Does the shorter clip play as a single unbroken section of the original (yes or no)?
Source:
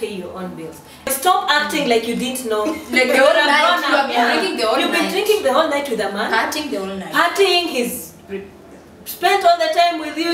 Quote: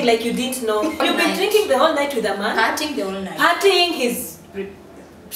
no